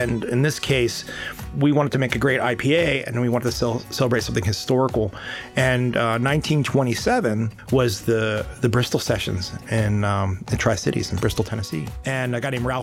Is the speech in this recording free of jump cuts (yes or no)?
no